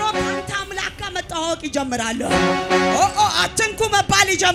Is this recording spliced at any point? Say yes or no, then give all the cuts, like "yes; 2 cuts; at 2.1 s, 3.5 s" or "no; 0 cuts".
no; 0 cuts